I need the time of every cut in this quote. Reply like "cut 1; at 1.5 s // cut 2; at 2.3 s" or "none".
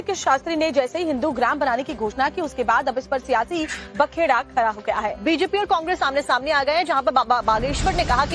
cut 1; at 3.2 s